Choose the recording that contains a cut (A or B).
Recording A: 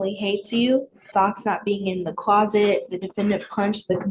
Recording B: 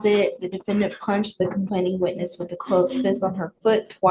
A